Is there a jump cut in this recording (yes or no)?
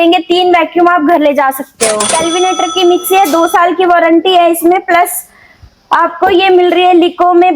yes